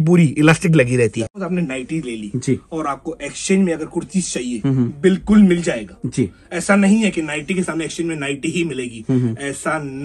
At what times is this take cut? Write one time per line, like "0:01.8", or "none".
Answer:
0:01.4